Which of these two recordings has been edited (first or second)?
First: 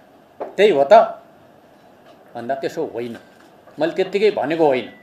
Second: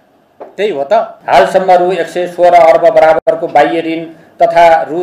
second